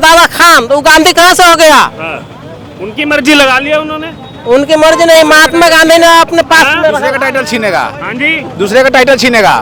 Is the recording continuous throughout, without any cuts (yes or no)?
yes